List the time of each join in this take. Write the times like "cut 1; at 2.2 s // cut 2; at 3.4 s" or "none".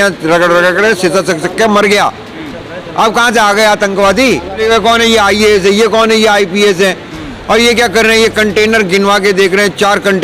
cut 1; at 4.6 s